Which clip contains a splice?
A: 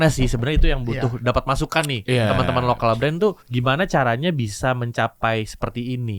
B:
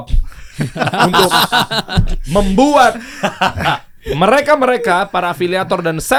A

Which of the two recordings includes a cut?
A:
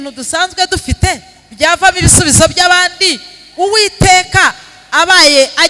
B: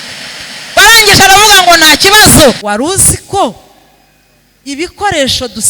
B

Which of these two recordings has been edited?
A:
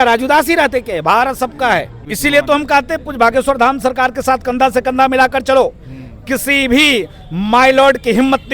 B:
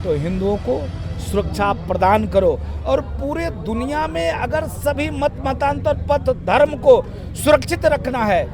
A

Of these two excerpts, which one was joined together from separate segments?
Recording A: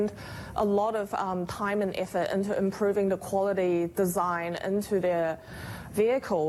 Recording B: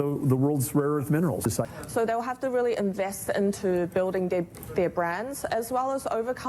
B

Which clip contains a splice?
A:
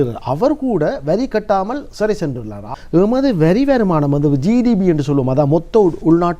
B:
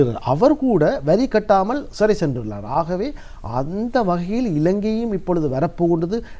A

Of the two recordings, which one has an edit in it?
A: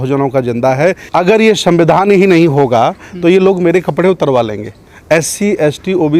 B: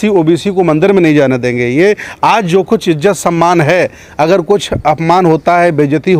A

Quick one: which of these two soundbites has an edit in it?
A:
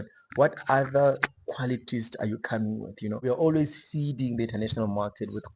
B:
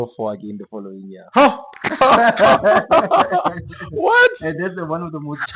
A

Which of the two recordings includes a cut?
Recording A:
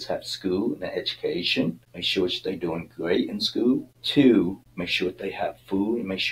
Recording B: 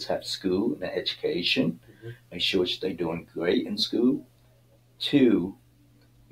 A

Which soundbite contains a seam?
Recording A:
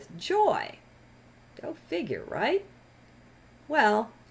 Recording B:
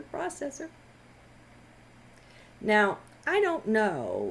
A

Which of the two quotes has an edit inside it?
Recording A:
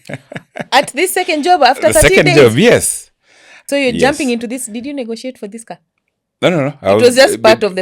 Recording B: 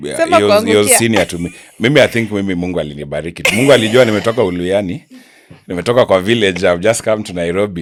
A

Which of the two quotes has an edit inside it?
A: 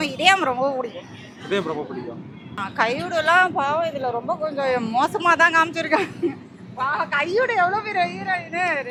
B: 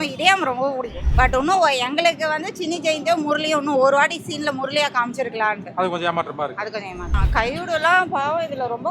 B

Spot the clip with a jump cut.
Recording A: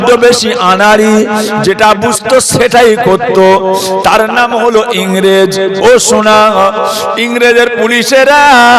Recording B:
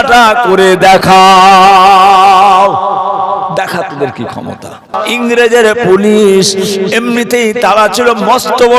B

